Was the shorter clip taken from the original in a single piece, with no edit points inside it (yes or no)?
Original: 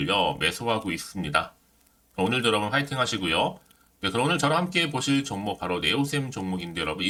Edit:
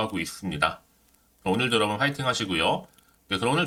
yes